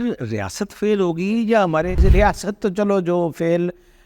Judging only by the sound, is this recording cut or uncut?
cut